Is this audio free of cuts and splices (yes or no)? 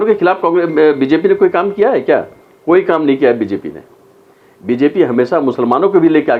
yes